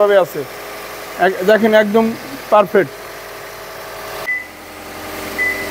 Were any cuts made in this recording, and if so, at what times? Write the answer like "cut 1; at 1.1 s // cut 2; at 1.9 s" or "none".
cut 1; at 4.2 s